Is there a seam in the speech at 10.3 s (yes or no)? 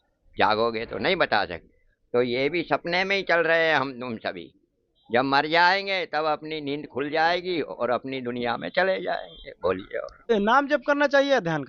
yes